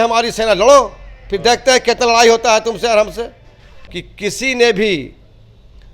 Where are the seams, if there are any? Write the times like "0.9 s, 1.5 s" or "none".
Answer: 3.7 s